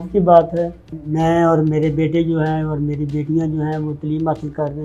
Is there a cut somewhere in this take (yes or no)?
yes